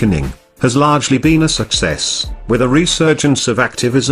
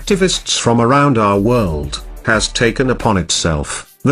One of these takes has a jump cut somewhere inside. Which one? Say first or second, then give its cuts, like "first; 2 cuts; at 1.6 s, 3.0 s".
second; 1 cut; at 1.4 s